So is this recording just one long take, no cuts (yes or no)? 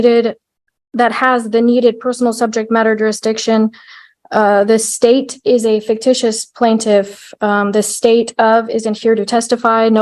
yes